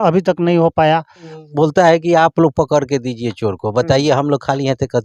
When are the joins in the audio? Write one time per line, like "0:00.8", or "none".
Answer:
0:01.3